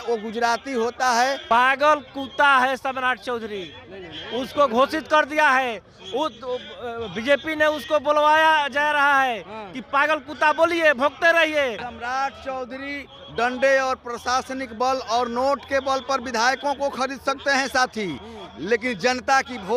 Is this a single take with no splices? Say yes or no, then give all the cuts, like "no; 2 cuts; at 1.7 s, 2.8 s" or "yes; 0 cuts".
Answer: no; 2 cuts; at 1.4 s, 11.9 s